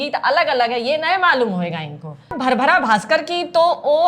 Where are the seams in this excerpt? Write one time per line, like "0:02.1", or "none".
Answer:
0:02.2